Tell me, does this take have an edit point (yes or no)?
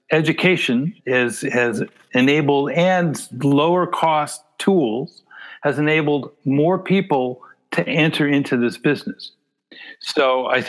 yes